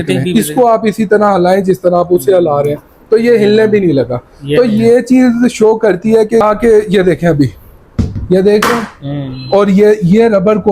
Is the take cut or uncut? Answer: cut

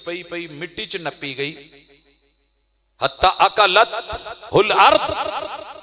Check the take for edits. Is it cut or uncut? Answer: uncut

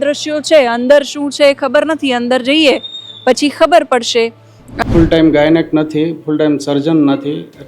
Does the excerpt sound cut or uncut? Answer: cut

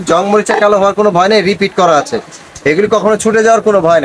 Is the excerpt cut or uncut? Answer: uncut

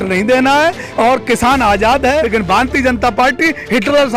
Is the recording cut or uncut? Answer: cut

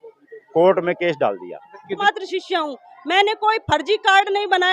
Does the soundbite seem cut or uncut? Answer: cut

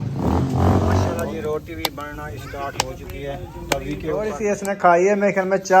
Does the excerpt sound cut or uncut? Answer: cut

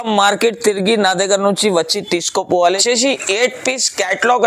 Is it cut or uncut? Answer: cut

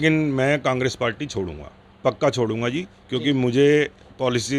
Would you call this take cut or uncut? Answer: cut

